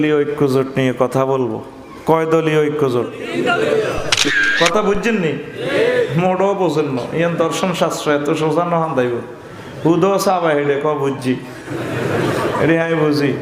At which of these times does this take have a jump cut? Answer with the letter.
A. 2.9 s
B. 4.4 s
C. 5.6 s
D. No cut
B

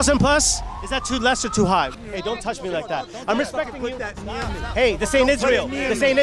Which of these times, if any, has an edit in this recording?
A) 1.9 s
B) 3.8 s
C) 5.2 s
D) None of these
A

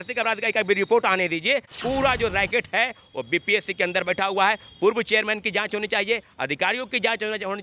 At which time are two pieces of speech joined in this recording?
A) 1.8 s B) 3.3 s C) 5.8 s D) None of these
A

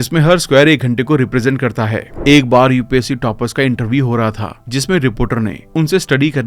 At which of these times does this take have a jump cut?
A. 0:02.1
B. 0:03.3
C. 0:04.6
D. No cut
A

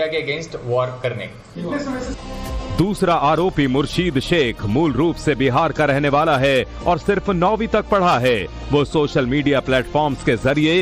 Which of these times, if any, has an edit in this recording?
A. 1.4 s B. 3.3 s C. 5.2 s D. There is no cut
D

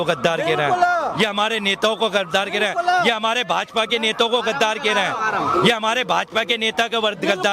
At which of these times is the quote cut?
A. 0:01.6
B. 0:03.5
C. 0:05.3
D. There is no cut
D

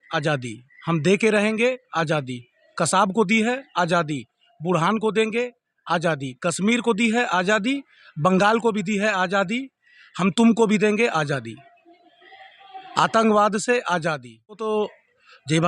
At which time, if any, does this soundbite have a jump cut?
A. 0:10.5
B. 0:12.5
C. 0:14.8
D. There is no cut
C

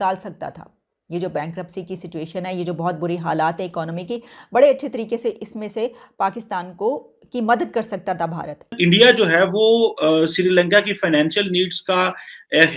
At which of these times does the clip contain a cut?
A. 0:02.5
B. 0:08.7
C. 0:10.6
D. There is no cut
B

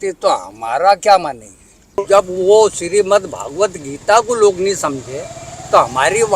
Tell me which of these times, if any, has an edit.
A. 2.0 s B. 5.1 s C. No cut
A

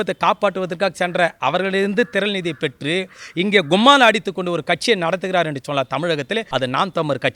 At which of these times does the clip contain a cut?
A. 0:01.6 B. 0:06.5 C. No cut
B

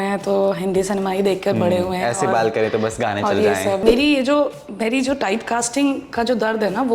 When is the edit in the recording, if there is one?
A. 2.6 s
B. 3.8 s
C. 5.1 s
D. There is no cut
B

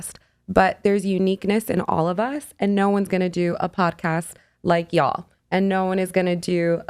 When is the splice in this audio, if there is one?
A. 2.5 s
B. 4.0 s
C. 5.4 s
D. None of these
D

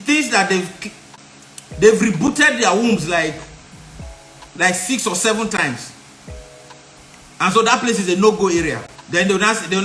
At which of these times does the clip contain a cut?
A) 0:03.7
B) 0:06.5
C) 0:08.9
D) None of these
D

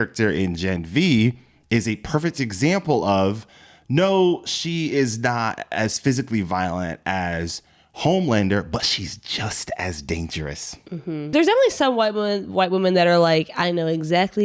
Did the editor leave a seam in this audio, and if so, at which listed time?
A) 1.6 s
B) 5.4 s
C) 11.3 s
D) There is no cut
C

